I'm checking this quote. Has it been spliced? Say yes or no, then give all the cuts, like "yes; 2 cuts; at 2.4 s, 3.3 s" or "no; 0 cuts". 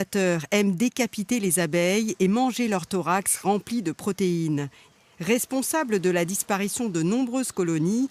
yes; 1 cut; at 7.0 s